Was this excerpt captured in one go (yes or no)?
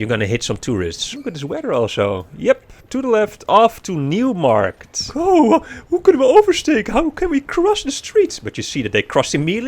no